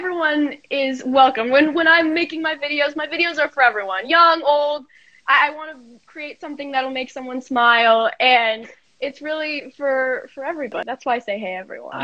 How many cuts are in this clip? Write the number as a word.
one